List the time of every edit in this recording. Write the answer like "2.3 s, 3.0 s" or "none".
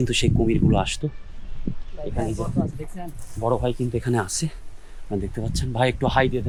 none